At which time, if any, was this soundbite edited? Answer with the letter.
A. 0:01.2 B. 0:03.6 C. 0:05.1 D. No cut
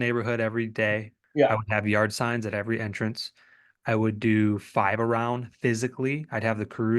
A